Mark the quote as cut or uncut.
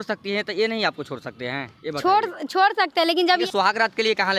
cut